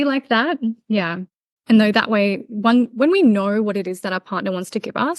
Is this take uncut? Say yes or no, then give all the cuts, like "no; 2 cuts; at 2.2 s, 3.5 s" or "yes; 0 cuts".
no; 1 cut; at 1.5 s